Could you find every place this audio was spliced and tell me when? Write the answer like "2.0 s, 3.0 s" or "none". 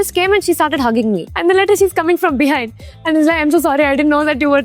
1.3 s